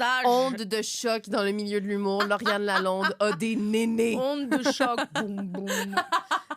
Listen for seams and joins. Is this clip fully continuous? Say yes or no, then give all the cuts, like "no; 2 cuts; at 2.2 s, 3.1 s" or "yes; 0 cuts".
yes; 0 cuts